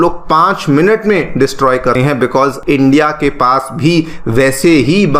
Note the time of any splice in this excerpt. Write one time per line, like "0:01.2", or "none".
0:02.3